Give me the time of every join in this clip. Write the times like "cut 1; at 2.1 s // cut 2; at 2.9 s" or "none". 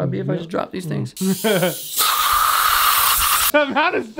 cut 1; at 1.0 s